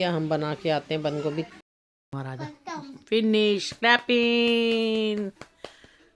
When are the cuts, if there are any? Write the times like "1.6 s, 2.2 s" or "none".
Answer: 1.5 s